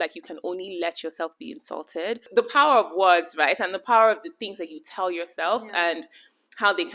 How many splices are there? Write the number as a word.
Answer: one